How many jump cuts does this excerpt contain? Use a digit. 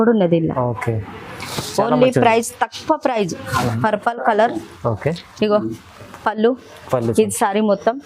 1